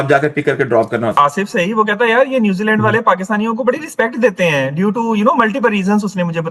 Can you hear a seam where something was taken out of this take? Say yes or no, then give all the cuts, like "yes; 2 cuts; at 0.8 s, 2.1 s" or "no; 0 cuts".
yes; 1 cut; at 1.1 s